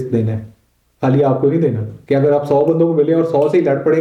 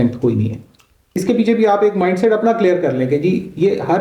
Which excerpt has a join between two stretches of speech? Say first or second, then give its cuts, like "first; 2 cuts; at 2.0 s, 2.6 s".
second; 1 cut; at 1.2 s